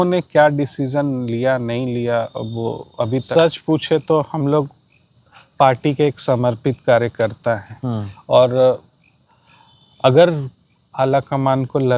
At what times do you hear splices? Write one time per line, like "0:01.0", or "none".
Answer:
0:03.3